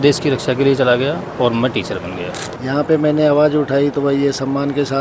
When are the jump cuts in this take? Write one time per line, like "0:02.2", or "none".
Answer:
0:02.5